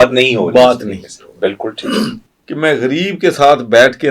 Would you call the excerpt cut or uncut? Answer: cut